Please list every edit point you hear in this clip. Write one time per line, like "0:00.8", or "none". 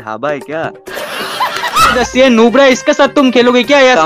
0:01.8